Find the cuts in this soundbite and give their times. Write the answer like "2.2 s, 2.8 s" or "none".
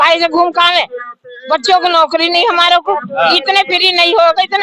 none